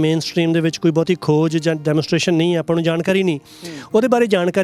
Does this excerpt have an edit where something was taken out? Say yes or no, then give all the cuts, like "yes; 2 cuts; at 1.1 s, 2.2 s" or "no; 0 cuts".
no; 0 cuts